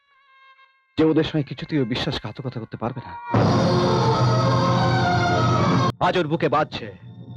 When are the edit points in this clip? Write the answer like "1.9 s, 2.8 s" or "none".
5.9 s